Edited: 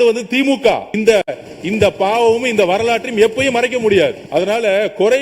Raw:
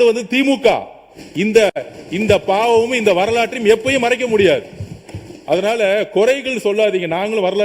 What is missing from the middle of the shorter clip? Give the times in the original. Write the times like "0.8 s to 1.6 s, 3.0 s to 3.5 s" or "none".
0.9 s to 1.4 s, 4.7 s to 5.4 s